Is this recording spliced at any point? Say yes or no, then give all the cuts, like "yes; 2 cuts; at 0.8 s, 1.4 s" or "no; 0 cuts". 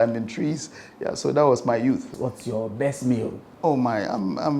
yes; 1 cut; at 2.1 s